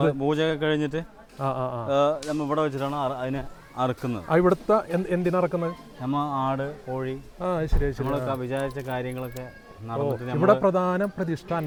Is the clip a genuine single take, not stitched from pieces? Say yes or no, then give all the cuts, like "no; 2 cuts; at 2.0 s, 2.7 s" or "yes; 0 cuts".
yes; 0 cuts